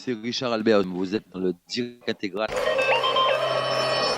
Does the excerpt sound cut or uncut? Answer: cut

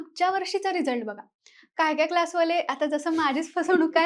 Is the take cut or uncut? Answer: uncut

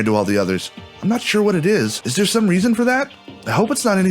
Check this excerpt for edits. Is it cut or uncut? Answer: cut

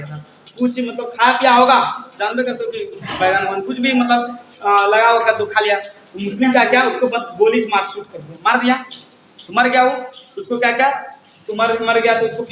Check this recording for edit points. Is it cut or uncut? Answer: uncut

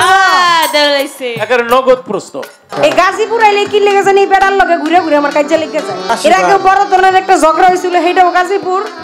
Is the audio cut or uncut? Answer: cut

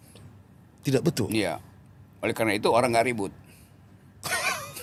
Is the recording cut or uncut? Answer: uncut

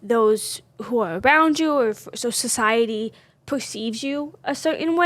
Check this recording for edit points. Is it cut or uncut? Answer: uncut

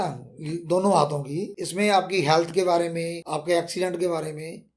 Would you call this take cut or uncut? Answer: cut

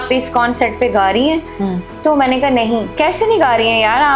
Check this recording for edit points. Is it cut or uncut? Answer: cut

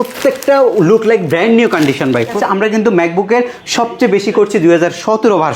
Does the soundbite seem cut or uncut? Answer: cut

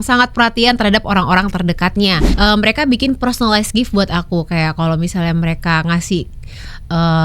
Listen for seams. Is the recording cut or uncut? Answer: cut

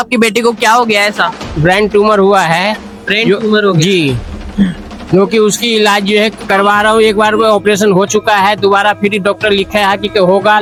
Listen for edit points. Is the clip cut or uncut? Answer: uncut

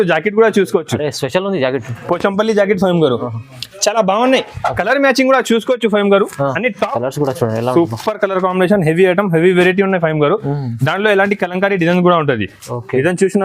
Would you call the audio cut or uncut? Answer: cut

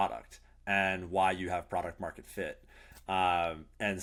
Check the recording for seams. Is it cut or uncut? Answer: uncut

